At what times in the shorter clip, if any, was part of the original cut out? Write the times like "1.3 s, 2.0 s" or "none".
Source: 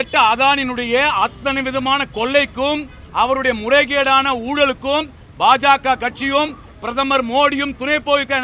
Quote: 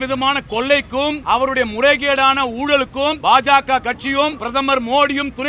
1.2 s, 3.2 s, 4.4 s